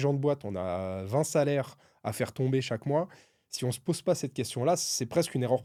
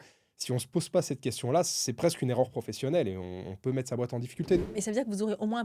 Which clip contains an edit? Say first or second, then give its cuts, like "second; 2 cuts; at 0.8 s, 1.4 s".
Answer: second; 1 cut; at 4.6 s